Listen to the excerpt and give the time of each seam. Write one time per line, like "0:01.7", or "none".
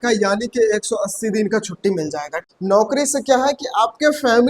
0:02.3